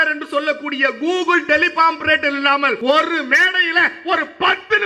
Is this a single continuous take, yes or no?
no